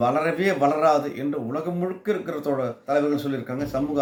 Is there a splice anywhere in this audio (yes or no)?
no